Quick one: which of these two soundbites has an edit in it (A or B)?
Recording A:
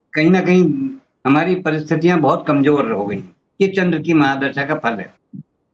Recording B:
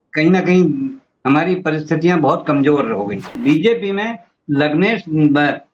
B